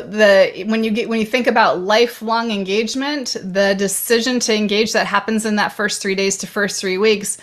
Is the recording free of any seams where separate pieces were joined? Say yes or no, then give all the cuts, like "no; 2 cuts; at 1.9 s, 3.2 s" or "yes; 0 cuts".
yes; 0 cuts